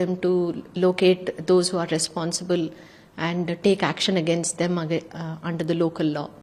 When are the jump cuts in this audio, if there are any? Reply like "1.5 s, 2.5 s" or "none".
none